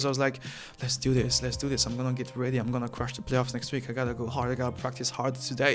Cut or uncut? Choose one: uncut